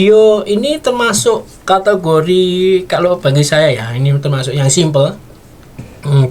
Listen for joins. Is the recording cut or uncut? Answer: uncut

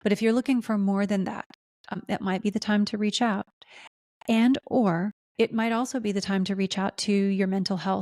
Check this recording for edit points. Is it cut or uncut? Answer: cut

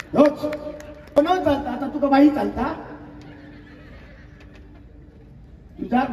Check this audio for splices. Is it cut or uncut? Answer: cut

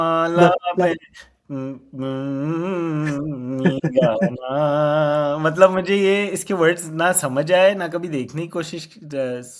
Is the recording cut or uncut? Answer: uncut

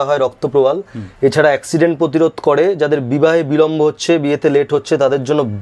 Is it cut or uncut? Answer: uncut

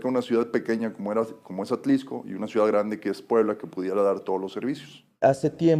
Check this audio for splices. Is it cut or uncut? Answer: cut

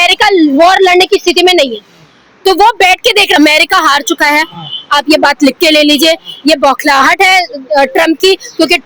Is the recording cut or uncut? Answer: cut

